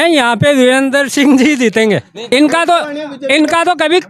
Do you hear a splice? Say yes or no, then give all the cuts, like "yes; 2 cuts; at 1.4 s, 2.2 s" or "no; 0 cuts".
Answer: yes; 1 cut; at 2.1 s